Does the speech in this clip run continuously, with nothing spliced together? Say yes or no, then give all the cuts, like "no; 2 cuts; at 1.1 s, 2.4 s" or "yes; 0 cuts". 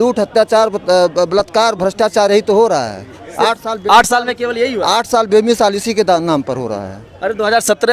yes; 0 cuts